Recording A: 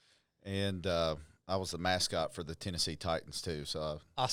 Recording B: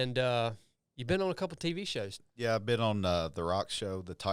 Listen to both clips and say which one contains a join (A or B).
B